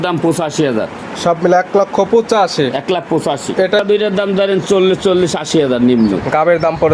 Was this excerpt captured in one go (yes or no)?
no